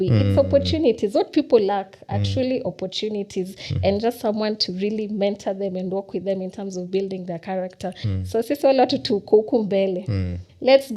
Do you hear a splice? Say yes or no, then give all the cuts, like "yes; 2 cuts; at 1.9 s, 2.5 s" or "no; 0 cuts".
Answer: no; 0 cuts